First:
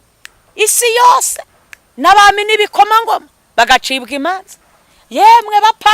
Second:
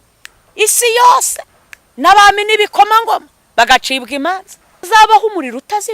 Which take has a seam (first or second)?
second